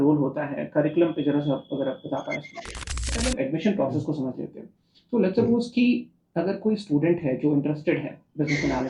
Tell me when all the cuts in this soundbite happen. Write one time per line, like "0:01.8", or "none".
0:03.1